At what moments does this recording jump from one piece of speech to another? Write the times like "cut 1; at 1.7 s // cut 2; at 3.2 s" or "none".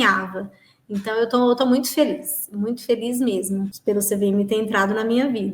cut 1; at 3.7 s

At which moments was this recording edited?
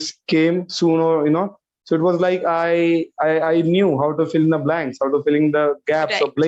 none

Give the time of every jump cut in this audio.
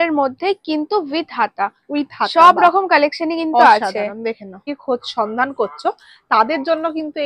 cut 1; at 4.7 s

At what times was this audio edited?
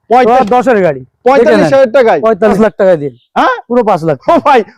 cut 1; at 2.5 s

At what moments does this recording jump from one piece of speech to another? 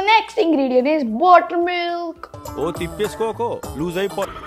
none

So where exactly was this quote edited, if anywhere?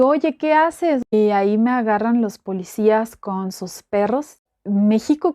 cut 1; at 1.1 s // cut 2; at 4.5 s

